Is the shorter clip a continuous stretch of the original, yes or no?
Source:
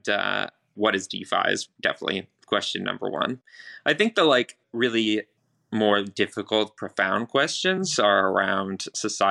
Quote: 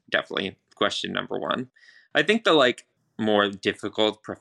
no